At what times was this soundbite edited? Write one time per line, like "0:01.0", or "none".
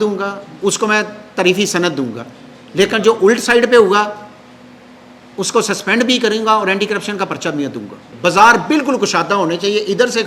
0:08.0